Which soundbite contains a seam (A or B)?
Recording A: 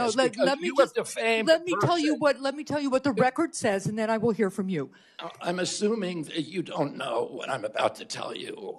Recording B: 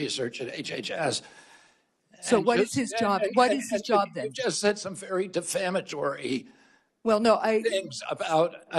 A